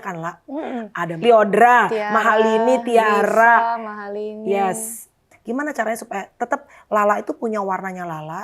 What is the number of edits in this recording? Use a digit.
2